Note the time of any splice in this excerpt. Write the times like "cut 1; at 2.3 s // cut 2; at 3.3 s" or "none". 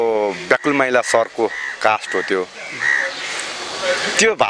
none